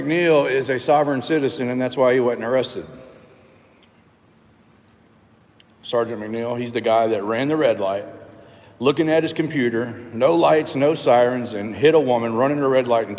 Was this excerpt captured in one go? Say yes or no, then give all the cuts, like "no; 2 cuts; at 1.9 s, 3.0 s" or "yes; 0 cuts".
yes; 0 cuts